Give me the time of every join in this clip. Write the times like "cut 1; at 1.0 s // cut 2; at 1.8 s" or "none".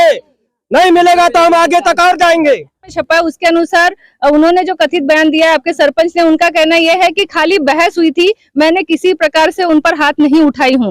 cut 1; at 2.9 s